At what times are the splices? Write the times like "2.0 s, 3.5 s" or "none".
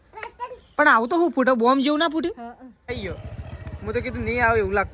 2.9 s